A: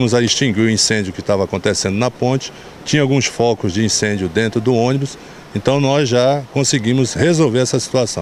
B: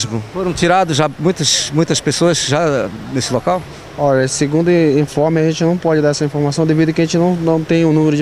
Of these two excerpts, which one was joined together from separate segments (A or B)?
B